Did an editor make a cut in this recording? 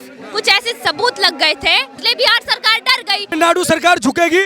yes; 2 cuts; at 2.0 s, 3.3 s

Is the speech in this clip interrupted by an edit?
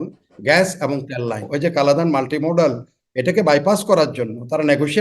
yes; 1 cut; at 1.5 s

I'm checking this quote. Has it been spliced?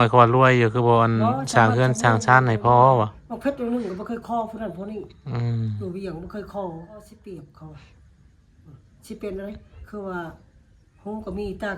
yes; 1 cut; at 7.1 s

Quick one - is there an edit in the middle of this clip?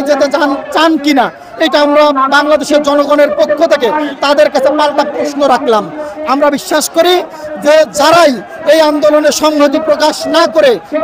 no; 0 cuts

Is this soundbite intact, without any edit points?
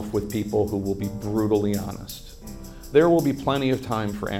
no; 1 cut; at 2.9 s

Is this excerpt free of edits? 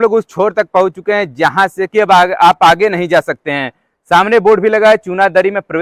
yes; 0 cuts

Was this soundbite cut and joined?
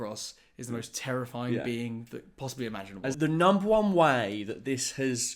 yes; 1 cut; at 3.1 s

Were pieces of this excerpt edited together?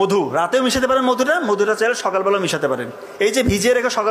no; 0 cuts

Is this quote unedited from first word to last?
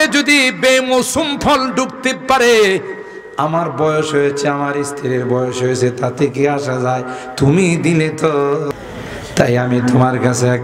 no; 1 cut; at 8.7 s

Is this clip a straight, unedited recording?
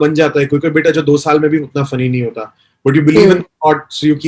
yes; 0 cuts

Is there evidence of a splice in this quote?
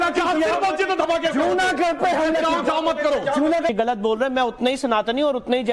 yes; 1 cut; at 3.7 s

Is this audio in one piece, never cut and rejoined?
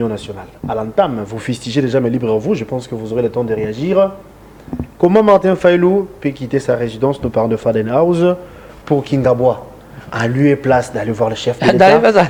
yes; 0 cuts

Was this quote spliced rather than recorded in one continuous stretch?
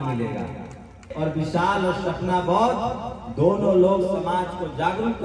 yes; 1 cut; at 1.1 s

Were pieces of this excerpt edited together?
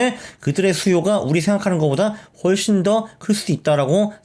no; 0 cuts

